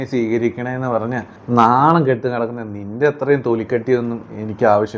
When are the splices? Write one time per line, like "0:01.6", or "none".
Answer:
0:01.3